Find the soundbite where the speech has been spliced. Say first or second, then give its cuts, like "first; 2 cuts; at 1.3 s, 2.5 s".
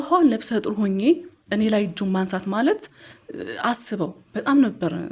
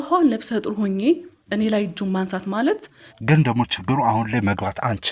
second; 1 cut; at 3.1 s